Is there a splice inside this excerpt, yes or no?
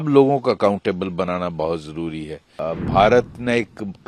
yes